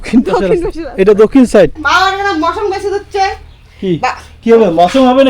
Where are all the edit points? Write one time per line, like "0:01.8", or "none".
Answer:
0:01.8